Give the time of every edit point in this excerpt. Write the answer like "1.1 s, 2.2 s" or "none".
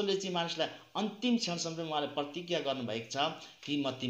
none